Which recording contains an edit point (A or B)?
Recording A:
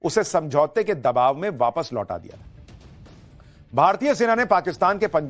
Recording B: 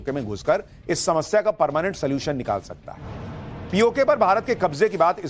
A